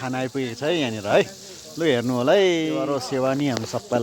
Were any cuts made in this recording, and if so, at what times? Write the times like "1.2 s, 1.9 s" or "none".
2.8 s